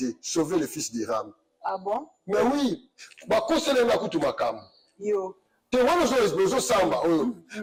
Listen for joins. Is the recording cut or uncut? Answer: uncut